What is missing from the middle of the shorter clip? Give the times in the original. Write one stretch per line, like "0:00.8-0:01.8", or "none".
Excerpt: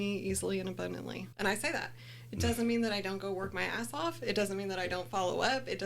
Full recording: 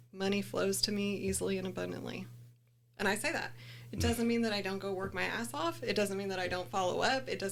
0:02.2-0:02.9